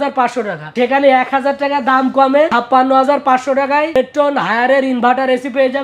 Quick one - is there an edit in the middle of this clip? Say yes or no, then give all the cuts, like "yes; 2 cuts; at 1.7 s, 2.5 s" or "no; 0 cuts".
no; 0 cuts